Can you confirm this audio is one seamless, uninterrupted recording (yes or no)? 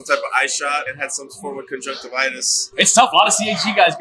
yes